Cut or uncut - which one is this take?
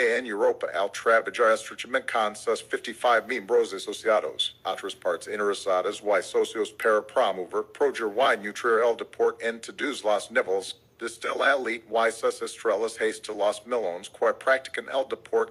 uncut